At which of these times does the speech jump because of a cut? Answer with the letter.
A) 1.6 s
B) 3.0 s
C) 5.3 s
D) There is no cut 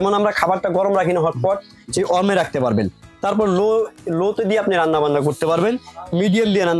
D